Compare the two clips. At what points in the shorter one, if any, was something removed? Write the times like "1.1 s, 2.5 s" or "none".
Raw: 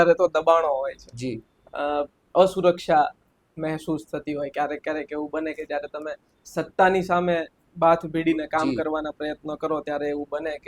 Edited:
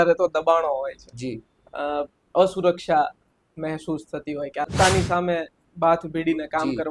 4.7 s